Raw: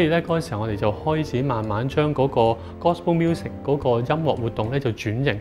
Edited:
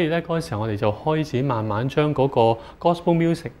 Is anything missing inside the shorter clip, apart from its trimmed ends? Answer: no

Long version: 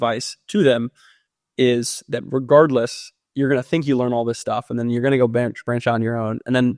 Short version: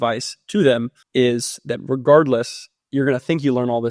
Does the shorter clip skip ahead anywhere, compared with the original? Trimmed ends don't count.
yes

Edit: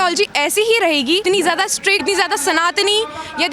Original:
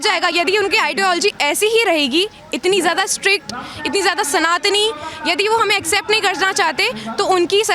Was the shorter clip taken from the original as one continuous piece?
no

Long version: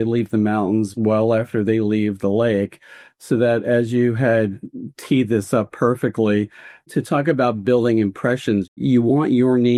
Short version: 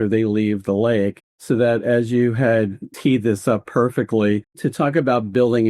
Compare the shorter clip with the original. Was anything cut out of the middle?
yes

